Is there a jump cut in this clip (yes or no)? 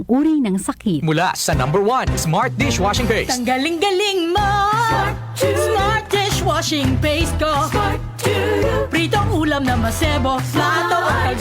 yes